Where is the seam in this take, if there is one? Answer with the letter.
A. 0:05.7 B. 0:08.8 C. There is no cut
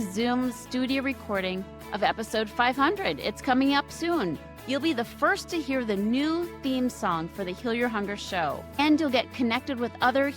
B